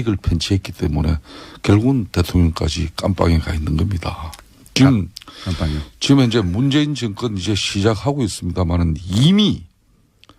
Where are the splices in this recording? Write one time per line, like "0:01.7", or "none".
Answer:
0:06.0